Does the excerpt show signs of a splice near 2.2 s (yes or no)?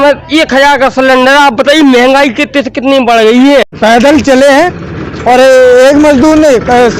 no